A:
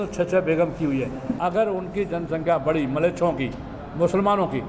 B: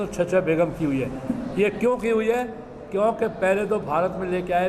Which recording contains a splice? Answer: A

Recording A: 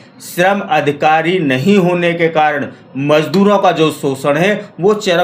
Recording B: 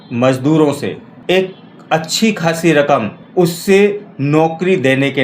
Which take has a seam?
B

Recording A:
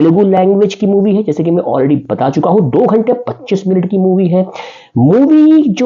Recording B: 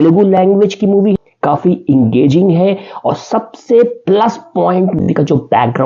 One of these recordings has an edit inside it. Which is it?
B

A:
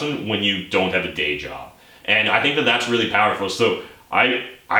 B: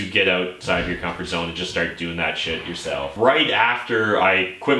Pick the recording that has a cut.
B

